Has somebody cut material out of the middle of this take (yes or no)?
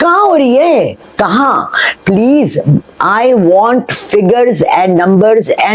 no